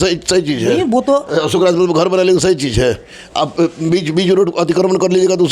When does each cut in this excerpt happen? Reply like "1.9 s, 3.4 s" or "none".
none